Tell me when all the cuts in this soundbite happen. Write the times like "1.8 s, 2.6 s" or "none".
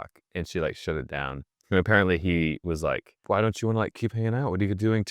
3.1 s